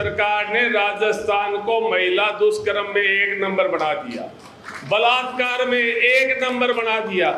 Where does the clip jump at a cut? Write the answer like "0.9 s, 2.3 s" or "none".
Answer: none